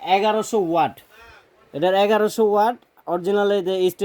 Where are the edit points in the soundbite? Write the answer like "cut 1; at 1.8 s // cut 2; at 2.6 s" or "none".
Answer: none